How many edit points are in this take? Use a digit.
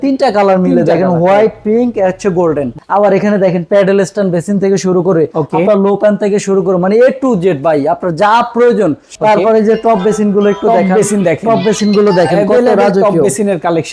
2